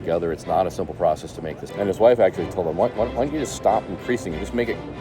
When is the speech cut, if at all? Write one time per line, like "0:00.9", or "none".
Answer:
0:01.6

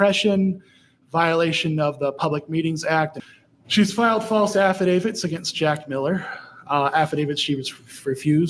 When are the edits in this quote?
0:03.2

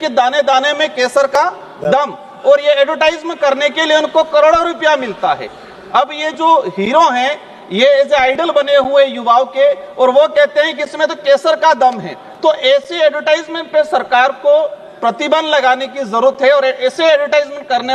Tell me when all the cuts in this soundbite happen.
none

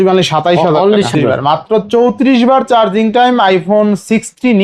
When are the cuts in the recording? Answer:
0:01.1

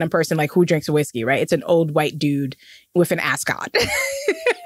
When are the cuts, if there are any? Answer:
none

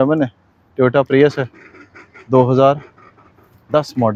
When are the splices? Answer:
none

